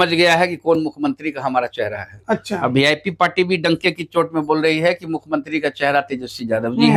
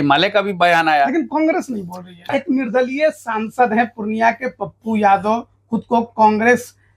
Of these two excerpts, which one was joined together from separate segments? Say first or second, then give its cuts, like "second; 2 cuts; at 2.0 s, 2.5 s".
second; 1 cut; at 2.3 s